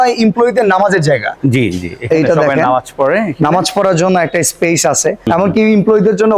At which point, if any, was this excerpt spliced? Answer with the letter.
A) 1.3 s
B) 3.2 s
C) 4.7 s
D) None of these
D